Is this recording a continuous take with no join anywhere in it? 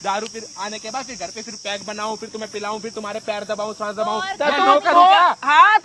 yes; 0 cuts

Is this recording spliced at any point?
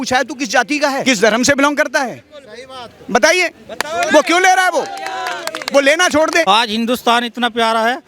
yes; 2 cuts; at 1.0 s, 6.4 s

